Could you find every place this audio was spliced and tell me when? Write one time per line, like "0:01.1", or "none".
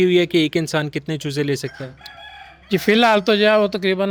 none